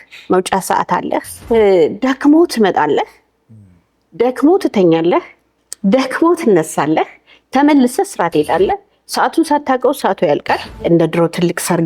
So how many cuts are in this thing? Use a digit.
2